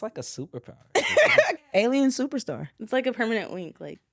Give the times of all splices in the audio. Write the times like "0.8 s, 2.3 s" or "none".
1.6 s